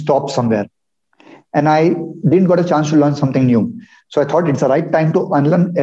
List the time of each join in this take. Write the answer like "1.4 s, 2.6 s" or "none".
none